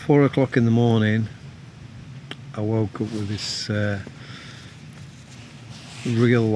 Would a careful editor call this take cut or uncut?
uncut